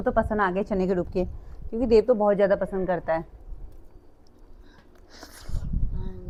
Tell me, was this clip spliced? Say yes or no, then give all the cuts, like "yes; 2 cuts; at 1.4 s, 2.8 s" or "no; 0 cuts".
no; 0 cuts